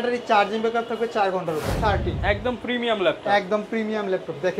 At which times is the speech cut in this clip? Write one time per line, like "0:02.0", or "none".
0:01.8